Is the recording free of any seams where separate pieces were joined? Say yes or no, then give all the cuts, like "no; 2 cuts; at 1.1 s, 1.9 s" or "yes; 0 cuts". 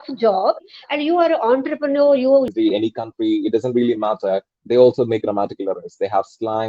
no; 1 cut; at 2.5 s